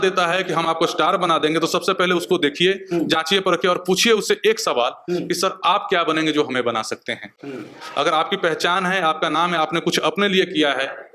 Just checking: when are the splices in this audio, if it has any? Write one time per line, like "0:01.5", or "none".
none